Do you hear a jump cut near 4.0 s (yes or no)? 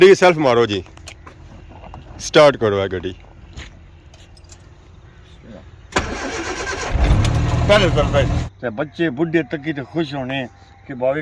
no